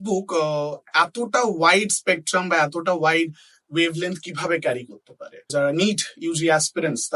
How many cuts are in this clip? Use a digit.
1